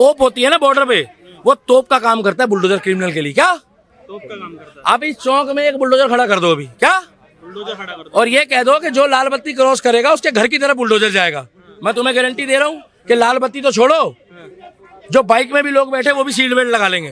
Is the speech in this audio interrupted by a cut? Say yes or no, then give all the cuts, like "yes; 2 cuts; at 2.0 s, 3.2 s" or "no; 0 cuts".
no; 0 cuts